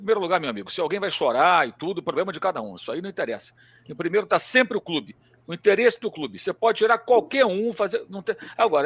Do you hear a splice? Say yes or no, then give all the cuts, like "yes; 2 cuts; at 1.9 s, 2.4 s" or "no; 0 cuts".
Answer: no; 0 cuts